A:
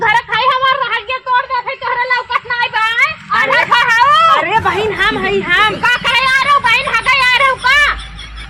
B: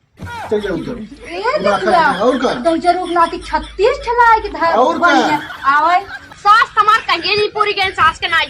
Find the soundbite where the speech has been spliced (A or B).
B